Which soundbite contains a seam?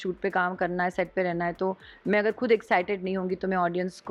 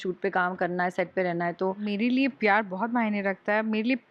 second; 1 cut; at 1.9 s

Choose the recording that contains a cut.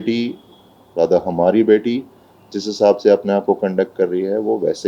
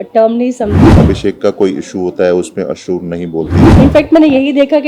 second; 2 cuts; at 1.0 s, 3.6 s

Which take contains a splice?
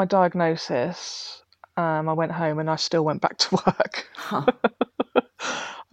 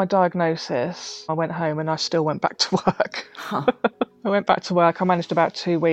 second; 2 cuts; at 1.3 s, 4.1 s

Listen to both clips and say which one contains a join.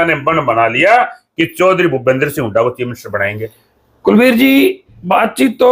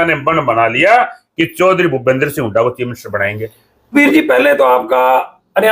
second; 1 cut; at 3.9 s

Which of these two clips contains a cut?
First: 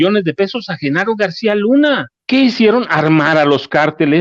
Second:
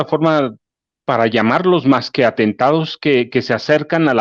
first; 1 cut; at 2.1 s

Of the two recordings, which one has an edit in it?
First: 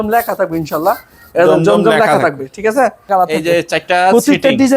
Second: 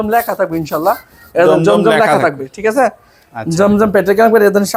first; 1 cut; at 3.1 s

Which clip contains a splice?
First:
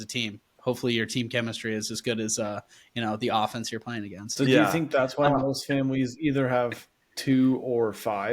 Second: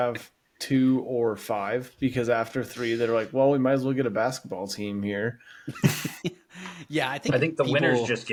first; 1 cut; at 4.3 s

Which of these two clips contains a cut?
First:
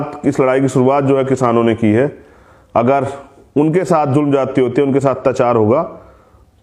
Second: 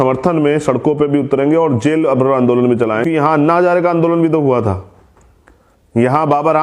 second; 1 cut; at 3.0 s

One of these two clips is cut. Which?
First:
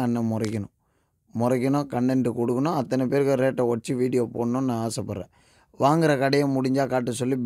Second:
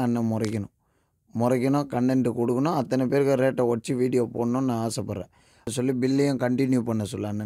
second; 1 cut; at 5.7 s

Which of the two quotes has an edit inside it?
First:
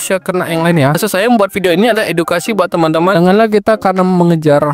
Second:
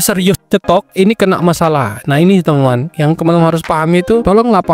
first; 2 cuts; at 1.0 s, 3.1 s

